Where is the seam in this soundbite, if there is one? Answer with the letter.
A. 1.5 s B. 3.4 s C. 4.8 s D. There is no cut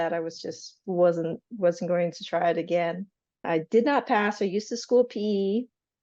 B